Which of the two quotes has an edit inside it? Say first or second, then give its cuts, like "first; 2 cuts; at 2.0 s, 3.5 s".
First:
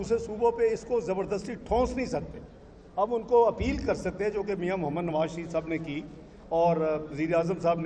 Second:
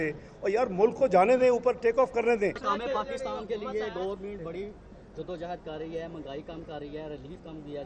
second; 1 cut; at 2.6 s